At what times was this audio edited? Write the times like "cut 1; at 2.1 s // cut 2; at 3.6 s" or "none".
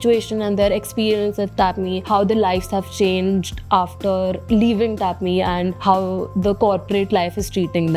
none